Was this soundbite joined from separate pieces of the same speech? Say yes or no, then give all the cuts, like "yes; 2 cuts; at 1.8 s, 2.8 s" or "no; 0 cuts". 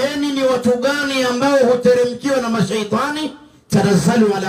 no; 0 cuts